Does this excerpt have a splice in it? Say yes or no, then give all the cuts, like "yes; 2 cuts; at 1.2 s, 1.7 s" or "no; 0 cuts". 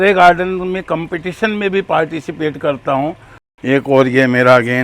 yes; 1 cut; at 3.4 s